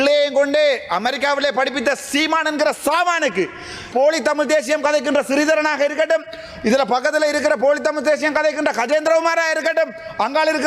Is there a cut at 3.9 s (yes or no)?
yes